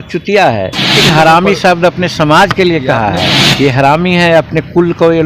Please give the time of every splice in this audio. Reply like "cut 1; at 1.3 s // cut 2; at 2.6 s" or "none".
cut 1; at 1.0 s // cut 2; at 3.4 s